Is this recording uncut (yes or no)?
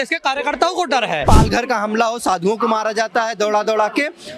no